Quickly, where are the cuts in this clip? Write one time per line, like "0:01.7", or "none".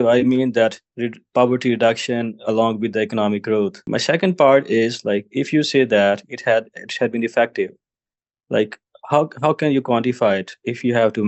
0:03.8